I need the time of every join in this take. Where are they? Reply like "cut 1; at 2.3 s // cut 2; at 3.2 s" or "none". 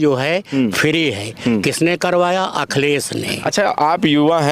cut 1; at 3.3 s